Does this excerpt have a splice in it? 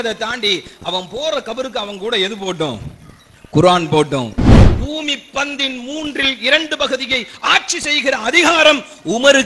yes; 1 cut; at 4.5 s

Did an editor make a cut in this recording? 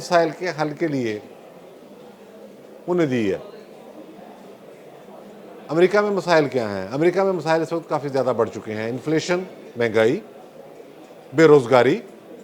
no; 0 cuts

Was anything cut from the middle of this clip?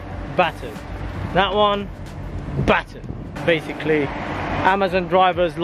no; 0 cuts

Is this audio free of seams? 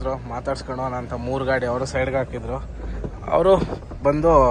yes; 0 cuts

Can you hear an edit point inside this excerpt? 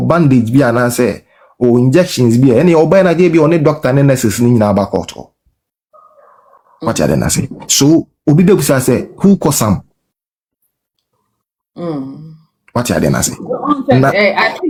no; 0 cuts

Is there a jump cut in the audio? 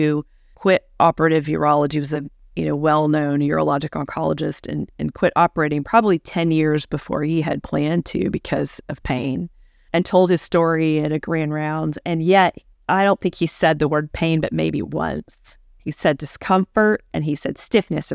no; 0 cuts

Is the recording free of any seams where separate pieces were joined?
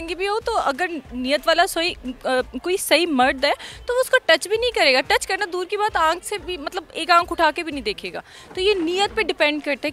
yes; 0 cuts

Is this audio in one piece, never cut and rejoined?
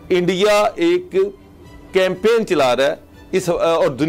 yes; 0 cuts

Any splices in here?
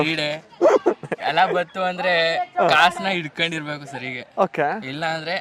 no; 0 cuts

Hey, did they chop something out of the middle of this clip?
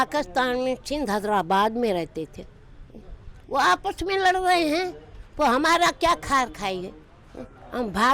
no; 0 cuts

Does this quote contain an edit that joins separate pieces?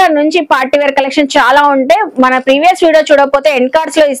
no; 0 cuts

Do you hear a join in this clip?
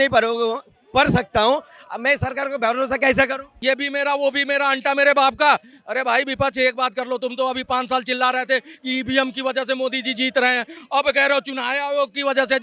yes; 1 cut; at 3.5 s

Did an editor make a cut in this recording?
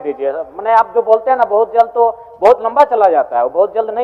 no; 0 cuts

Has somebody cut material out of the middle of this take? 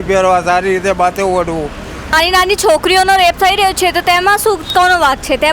yes; 1 cut; at 2.1 s

